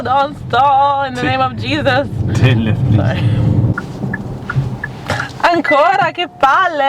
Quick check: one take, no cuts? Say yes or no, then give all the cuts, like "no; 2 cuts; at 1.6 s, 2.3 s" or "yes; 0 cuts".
no; 1 cut; at 3.7 s